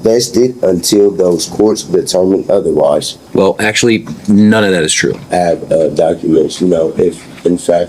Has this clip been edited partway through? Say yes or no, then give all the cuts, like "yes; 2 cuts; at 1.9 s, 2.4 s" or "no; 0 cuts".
yes; 2 cuts; at 3.2 s, 5.2 s